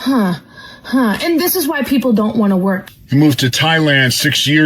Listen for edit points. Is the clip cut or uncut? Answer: cut